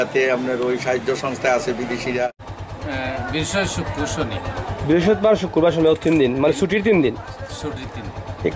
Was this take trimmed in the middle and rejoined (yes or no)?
yes